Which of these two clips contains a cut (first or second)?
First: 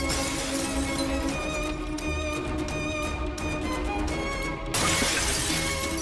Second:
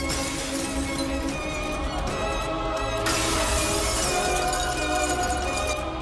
second